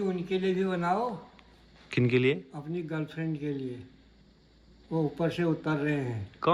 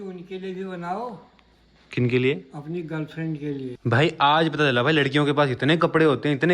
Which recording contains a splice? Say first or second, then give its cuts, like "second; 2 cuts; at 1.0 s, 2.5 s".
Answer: second; 1 cut; at 3.7 s